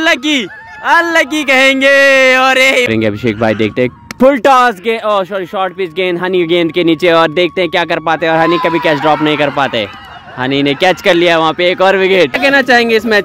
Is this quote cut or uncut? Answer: cut